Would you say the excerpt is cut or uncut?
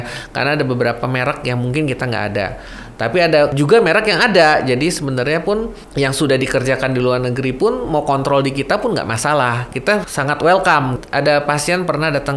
cut